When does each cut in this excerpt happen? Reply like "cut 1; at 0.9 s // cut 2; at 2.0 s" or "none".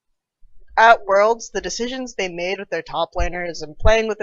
none